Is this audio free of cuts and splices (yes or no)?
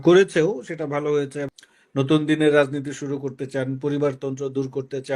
no